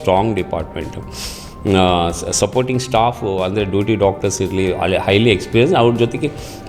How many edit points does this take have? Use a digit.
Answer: 0